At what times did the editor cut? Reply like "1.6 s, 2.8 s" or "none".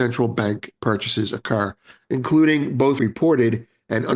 3.0 s